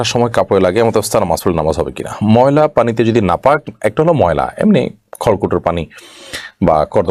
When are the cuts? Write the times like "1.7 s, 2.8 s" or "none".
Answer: none